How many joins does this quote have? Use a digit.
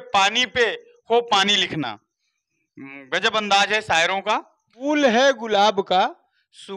1